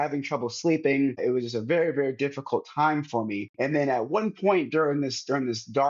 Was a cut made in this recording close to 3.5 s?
yes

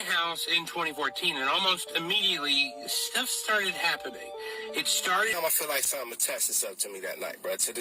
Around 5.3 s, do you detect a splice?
yes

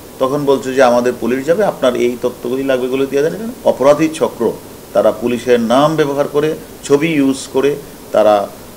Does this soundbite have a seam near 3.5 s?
yes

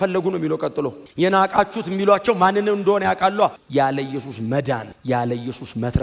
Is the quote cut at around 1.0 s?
no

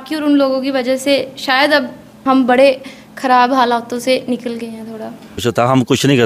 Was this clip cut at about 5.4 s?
yes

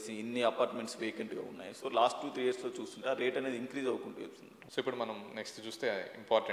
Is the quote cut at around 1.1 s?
no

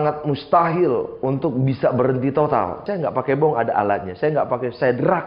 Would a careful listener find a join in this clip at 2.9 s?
yes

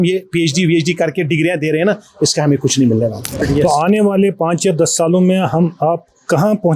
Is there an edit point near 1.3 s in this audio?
no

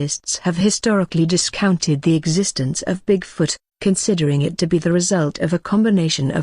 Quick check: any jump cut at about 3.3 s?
yes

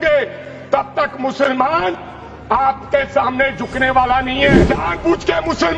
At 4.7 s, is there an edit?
yes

